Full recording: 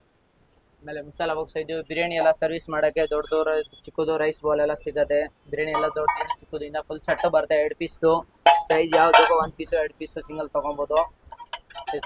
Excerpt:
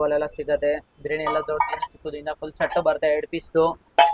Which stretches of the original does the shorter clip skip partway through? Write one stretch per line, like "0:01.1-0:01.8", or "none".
none